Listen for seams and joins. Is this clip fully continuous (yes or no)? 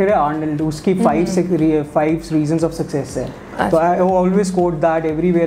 yes